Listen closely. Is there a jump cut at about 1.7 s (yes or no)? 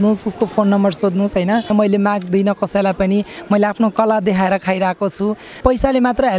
yes